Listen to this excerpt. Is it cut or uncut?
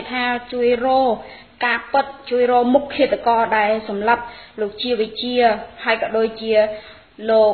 cut